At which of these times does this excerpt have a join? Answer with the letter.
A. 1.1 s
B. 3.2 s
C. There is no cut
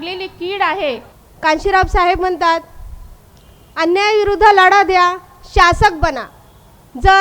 A